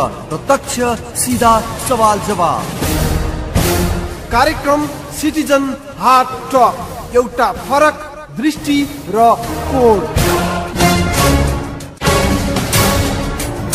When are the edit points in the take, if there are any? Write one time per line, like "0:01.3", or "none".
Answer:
0:11.8
0:13.0